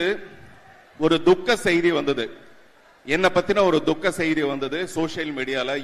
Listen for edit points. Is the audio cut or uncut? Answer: uncut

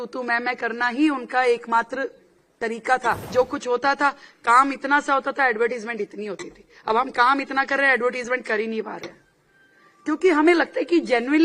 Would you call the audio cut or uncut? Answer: cut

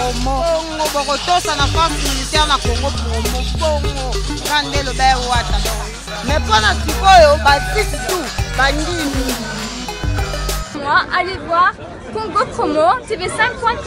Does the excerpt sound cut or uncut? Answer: cut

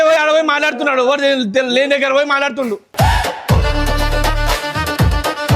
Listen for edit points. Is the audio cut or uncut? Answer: uncut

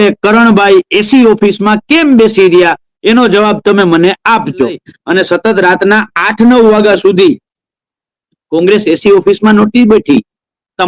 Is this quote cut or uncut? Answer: cut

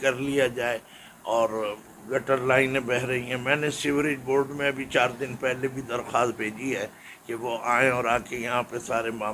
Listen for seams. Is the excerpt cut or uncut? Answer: uncut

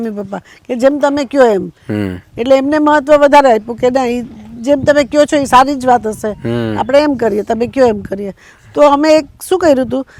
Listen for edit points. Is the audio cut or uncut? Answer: uncut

